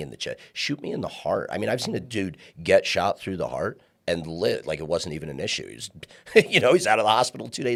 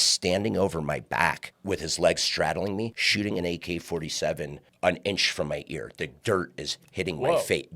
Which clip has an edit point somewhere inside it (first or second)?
second